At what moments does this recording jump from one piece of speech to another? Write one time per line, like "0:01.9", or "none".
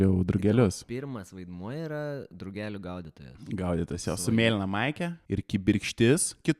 0:05.1